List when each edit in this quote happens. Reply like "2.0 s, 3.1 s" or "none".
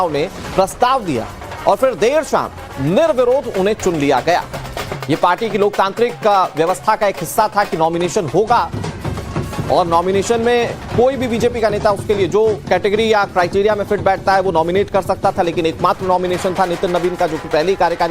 9.9 s